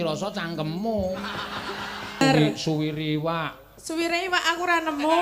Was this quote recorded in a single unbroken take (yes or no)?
no